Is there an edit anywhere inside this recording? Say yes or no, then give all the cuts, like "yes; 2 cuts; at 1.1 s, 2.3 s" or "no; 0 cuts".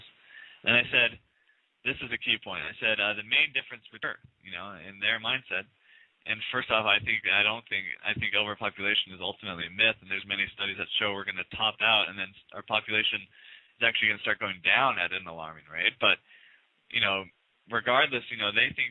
no; 0 cuts